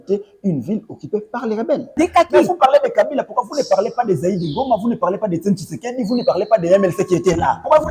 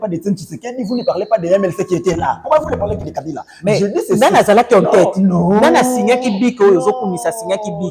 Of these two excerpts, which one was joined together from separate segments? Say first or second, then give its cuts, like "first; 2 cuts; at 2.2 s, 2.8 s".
first; 1 cut; at 1.9 s